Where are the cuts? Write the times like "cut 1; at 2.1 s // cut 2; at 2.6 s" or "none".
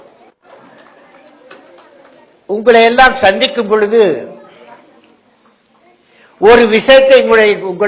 cut 1; at 2.6 s